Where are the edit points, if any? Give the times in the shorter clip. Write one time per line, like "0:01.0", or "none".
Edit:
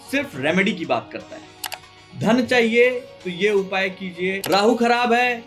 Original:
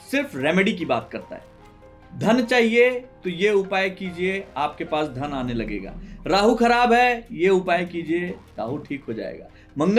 0:04.4